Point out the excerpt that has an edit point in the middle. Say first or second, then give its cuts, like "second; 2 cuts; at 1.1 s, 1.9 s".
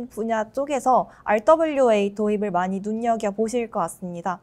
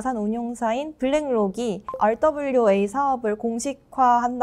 second; 1 cut; at 1.8 s